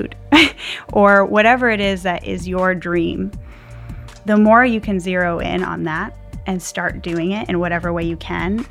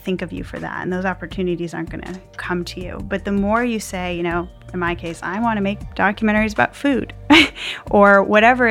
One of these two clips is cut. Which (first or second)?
second